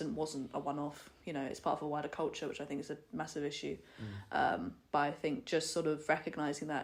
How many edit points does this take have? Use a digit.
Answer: 0